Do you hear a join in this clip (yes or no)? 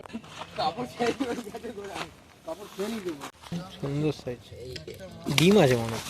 yes